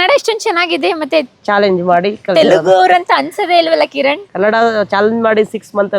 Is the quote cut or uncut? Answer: cut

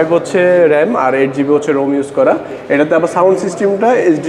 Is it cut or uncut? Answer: uncut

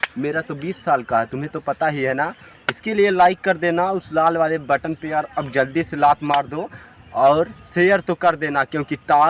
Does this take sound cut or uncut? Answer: uncut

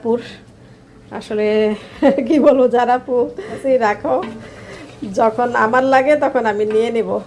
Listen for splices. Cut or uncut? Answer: cut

